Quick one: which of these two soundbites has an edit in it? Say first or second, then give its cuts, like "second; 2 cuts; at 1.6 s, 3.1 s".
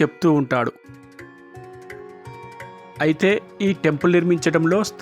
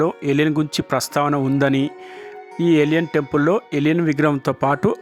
first; 2 cuts; at 0.7 s, 3.0 s